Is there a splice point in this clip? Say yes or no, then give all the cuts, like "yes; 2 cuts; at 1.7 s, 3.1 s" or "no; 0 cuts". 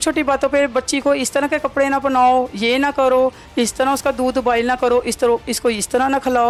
no; 0 cuts